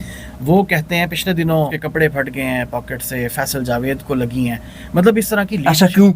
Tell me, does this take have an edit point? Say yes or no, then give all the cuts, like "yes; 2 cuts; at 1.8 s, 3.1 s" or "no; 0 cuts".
yes; 1 cut; at 1.8 s